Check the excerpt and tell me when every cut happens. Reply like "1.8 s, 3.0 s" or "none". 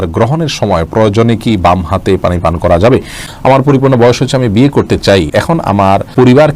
3.3 s, 5.7 s